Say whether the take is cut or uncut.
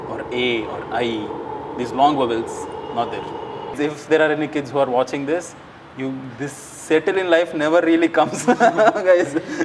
cut